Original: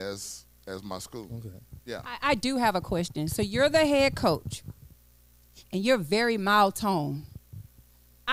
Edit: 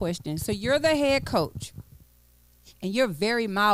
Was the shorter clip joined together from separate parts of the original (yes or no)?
no